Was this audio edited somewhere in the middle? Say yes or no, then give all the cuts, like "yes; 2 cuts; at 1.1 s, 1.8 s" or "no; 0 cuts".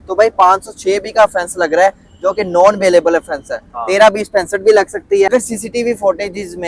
no; 0 cuts